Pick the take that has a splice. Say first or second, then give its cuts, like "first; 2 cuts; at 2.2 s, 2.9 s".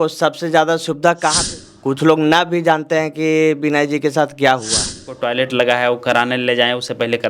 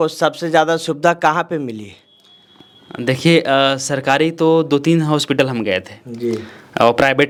first; 2 cuts; at 1.2 s, 5.2 s